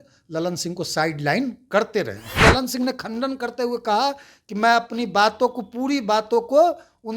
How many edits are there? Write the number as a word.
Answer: one